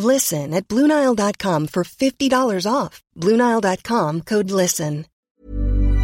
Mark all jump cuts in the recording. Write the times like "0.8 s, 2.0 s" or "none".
5.1 s